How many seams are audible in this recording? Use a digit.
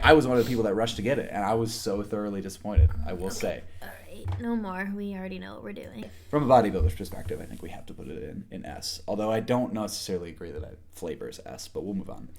0